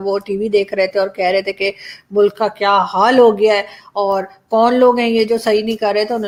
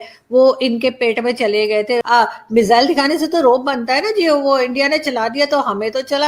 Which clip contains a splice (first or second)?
second